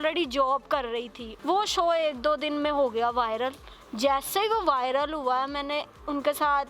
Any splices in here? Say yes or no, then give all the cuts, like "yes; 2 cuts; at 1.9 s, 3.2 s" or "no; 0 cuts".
no; 0 cuts